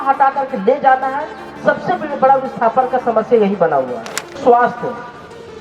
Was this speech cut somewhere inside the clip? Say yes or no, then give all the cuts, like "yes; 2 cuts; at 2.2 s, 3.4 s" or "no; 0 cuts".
yes; 1 cut; at 4.4 s